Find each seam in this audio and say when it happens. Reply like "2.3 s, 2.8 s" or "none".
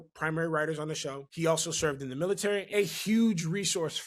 1.2 s, 2.7 s